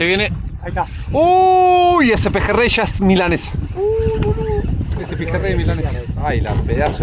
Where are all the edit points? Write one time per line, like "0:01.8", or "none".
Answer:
none